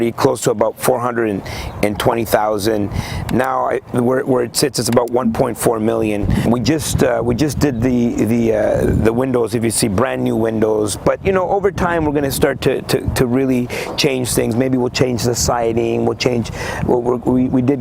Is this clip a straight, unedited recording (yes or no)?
yes